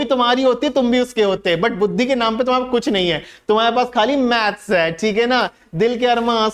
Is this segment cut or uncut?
uncut